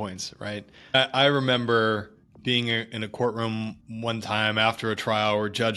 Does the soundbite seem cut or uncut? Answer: cut